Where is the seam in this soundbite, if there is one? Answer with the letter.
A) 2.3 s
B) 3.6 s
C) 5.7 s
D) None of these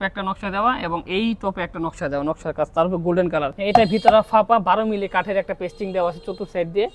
B